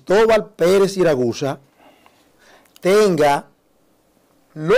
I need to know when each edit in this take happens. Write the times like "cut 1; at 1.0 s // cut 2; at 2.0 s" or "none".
none